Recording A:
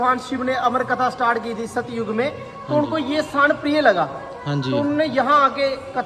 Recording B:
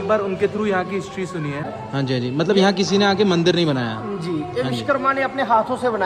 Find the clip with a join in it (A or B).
B